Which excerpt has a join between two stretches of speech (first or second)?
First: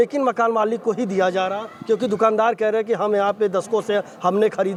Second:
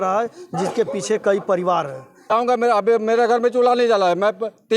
second